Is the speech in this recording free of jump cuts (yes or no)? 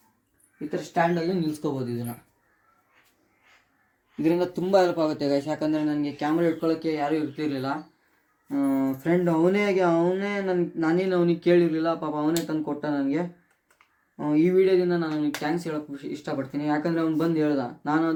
yes